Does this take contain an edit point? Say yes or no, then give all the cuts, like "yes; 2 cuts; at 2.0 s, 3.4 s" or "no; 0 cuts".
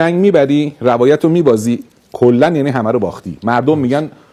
no; 0 cuts